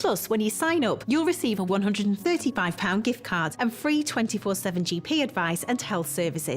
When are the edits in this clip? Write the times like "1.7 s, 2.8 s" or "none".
1.0 s, 3.5 s